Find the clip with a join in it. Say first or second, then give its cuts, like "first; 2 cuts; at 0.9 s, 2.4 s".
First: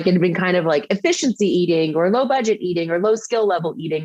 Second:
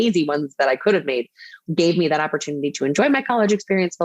second; 1 cut; at 1.5 s